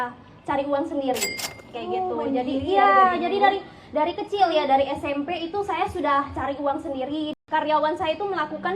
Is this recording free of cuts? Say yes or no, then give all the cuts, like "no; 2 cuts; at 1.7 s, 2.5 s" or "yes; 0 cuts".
no; 1 cut; at 7.3 s